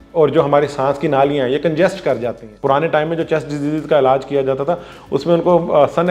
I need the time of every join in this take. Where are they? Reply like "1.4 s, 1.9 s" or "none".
2.5 s